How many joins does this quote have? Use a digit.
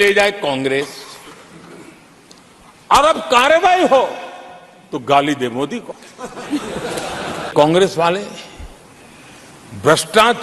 1